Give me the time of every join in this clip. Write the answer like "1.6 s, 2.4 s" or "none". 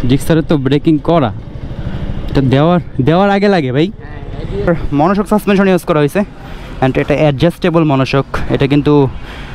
4.7 s